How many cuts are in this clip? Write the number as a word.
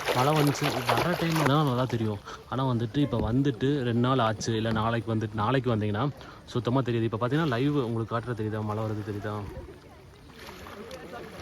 one